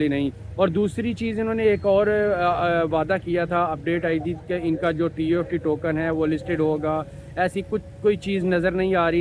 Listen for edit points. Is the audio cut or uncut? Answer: uncut